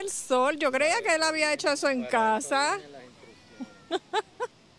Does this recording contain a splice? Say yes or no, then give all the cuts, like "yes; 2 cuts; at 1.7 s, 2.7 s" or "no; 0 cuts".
no; 0 cuts